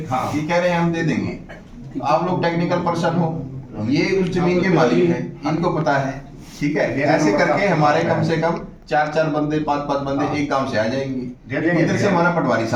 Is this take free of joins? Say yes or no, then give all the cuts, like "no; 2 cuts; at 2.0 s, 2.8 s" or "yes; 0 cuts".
yes; 0 cuts